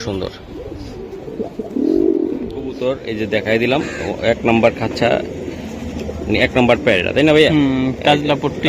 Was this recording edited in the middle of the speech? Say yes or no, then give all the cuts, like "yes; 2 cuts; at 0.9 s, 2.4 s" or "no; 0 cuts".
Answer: yes; 1 cut; at 2.7 s